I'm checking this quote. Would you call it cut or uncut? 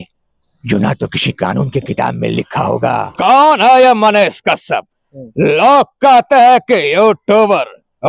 cut